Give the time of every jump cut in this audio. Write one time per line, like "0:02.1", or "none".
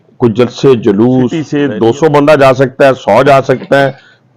0:01.4